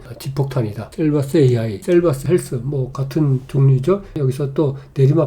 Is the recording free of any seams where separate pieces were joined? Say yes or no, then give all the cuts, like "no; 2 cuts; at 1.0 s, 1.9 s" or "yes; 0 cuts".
no; 1 cut; at 4.1 s